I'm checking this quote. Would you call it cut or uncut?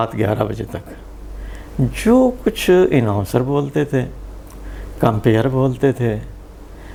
uncut